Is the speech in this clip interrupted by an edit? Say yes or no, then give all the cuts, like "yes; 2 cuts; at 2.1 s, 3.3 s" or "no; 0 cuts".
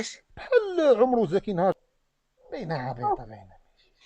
yes; 1 cut; at 1.8 s